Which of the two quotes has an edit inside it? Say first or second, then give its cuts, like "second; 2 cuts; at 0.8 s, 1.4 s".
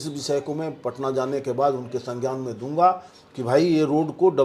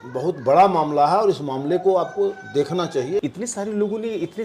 second; 1 cut; at 3.2 s